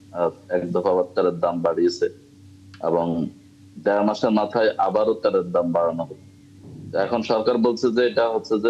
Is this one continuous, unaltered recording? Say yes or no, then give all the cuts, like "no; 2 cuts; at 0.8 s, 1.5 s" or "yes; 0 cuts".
yes; 0 cuts